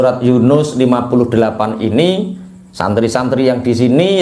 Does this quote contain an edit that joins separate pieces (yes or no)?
no